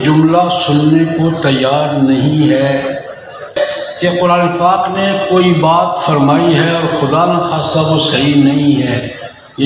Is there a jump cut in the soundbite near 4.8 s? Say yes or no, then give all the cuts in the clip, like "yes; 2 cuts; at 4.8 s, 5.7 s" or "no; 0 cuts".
no; 1 cut; at 3.5 s